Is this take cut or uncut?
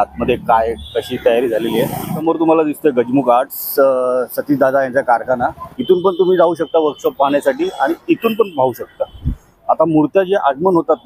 cut